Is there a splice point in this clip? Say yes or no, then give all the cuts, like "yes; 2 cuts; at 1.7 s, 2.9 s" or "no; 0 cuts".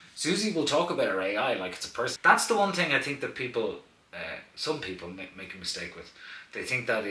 yes; 1 cut; at 2.1 s